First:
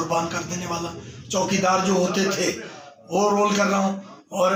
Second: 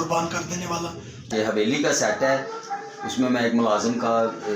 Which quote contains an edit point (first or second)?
second